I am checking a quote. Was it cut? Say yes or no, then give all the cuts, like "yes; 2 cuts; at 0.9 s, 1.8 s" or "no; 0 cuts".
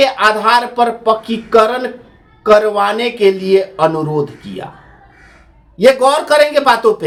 no; 0 cuts